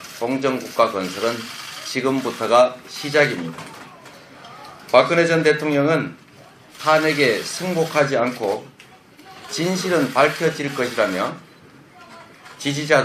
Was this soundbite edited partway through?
yes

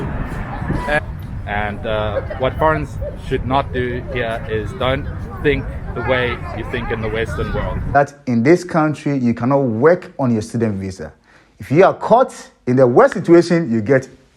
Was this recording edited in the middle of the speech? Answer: yes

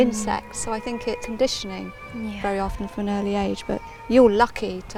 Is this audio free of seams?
yes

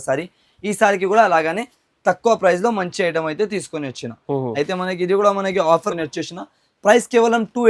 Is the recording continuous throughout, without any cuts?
no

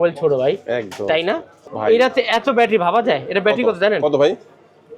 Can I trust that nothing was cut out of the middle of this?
no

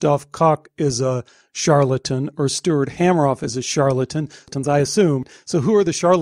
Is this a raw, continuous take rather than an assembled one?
no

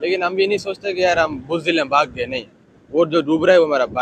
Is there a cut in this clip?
no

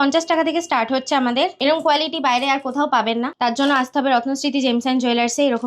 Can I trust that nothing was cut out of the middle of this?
no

